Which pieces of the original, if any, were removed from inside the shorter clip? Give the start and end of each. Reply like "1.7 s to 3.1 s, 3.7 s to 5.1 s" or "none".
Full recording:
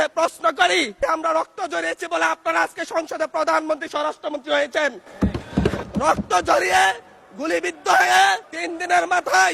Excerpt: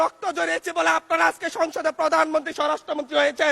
none